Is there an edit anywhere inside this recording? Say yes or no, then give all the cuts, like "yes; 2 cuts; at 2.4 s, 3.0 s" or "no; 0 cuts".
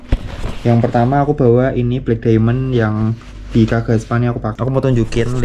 yes; 1 cut; at 4.5 s